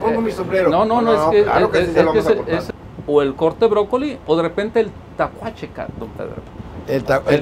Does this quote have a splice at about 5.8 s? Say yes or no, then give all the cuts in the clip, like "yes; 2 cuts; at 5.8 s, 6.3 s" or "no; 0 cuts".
no; 1 cut; at 2.7 s